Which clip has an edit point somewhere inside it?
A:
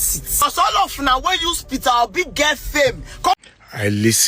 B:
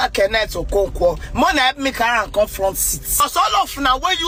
A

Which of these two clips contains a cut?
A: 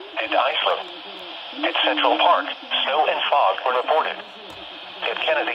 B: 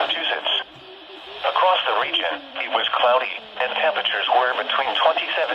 B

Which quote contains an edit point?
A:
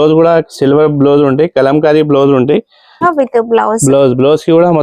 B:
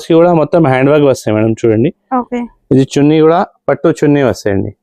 A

